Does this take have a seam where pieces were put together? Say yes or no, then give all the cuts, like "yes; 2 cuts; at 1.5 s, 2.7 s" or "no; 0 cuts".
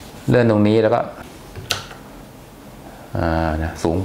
yes; 1 cut; at 1.2 s